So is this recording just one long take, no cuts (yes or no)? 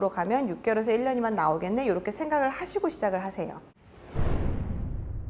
no